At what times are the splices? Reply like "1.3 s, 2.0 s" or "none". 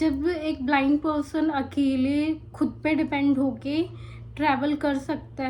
none